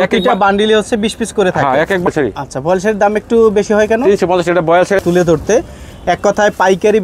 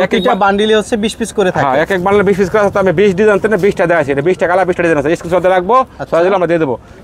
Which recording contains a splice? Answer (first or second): first